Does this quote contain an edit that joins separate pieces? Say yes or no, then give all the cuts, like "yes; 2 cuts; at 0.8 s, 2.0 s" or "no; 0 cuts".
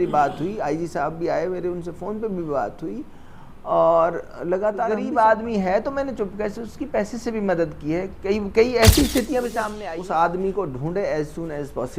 yes; 2 cuts; at 4.9 s, 9.8 s